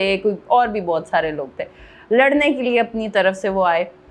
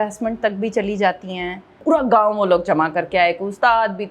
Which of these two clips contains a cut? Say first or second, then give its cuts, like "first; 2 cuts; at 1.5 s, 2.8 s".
second; 1 cut; at 1.7 s